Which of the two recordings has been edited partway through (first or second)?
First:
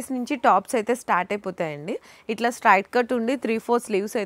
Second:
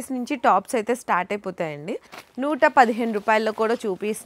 second